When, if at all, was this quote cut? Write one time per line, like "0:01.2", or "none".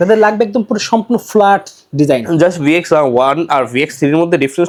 none